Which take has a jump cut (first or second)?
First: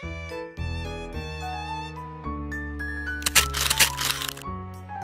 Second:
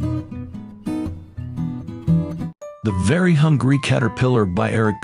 second